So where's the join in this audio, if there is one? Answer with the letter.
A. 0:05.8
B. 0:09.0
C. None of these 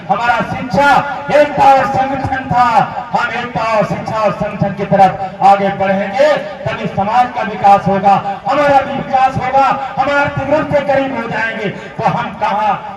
C